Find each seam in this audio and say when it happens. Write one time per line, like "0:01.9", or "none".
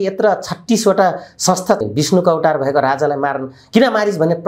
0:01.9